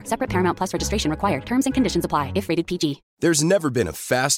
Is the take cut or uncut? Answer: cut